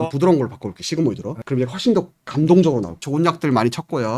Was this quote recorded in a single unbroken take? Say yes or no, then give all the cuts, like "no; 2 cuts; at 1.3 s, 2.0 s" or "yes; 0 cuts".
no; 1 cut; at 3.0 s